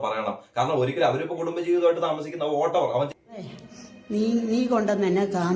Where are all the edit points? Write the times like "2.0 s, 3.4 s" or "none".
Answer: 3.1 s